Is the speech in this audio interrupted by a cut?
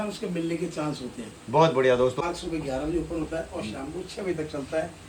yes; 1 cut; at 2.2 s

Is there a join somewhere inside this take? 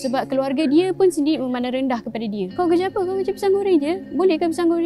no; 0 cuts

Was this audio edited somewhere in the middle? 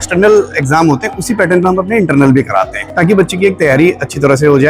yes; 1 cut; at 2.8 s

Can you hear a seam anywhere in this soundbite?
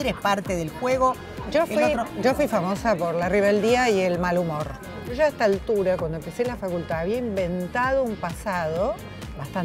yes; 2 cuts; at 1.4 s, 5.2 s

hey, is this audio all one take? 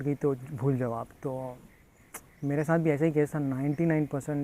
yes; 0 cuts

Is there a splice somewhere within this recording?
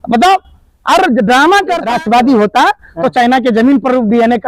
yes; 1 cut; at 1.8 s

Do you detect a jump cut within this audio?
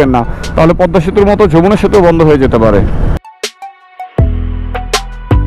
yes; 1 cut; at 3.2 s

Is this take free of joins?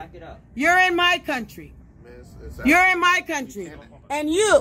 yes; 0 cuts

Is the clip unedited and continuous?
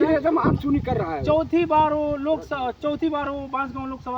yes; 0 cuts

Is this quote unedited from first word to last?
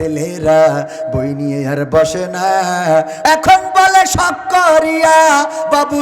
no; 1 cut; at 3.2 s

